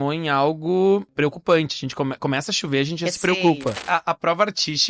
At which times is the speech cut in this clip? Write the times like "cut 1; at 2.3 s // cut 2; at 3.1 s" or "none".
cut 1; at 1.1 s // cut 2; at 3.8 s